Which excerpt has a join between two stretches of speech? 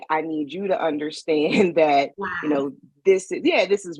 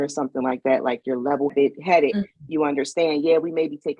second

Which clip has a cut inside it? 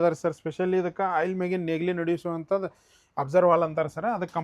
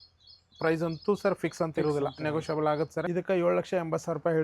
second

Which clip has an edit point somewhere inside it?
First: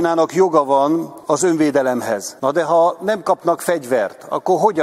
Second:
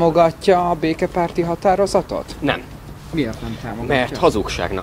first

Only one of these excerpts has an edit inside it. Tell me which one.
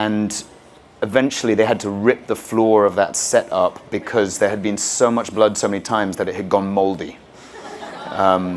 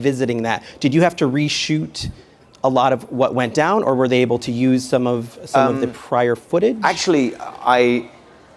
first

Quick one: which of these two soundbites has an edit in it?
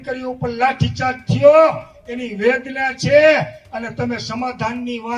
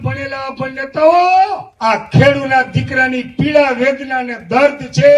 second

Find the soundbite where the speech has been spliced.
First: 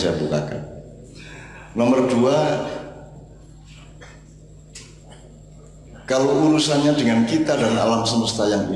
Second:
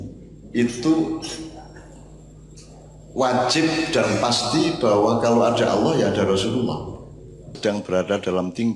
second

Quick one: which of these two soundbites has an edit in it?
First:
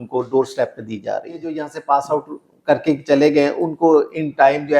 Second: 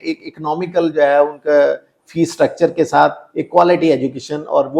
first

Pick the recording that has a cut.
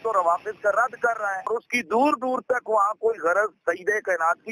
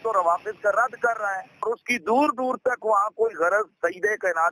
first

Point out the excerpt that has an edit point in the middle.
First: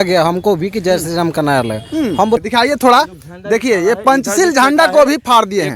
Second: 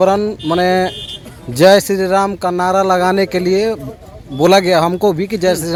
first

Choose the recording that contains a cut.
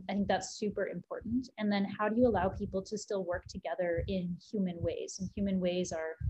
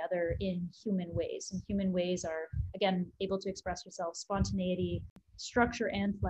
second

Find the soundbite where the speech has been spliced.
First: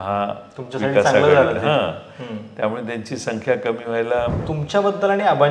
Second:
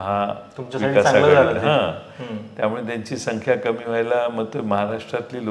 first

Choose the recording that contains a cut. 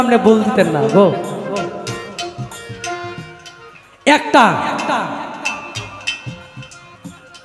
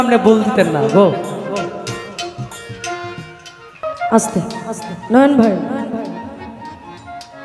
second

